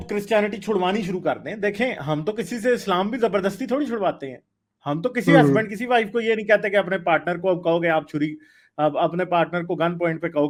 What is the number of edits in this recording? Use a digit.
0